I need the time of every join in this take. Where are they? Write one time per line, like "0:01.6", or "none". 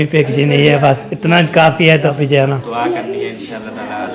0:02.1